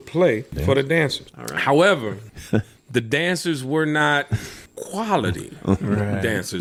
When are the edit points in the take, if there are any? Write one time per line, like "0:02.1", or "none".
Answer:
none